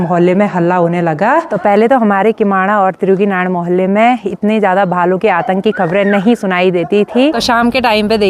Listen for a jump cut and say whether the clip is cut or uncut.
cut